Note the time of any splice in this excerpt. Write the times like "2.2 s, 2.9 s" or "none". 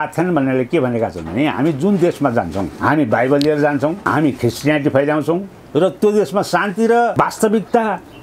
2.7 s, 4.0 s, 7.1 s